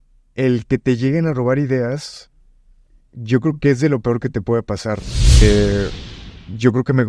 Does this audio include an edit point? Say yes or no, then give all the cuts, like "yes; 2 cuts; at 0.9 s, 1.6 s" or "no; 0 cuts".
yes; 1 cut; at 5.4 s